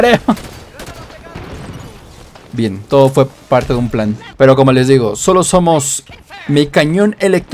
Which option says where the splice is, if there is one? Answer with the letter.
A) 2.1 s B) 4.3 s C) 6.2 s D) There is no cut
B